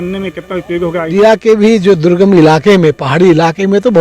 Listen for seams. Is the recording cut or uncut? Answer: cut